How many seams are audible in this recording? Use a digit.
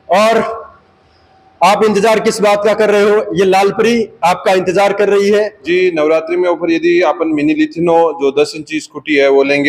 1